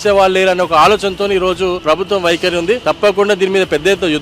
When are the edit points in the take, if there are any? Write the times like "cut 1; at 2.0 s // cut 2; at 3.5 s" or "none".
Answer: cut 1; at 1.8 s // cut 2; at 2.8 s